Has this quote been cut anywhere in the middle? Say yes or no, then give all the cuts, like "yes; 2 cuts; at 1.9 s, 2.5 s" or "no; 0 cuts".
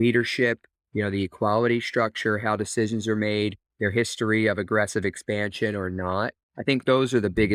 no; 0 cuts